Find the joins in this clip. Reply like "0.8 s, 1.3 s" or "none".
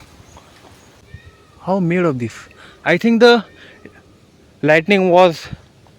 1.0 s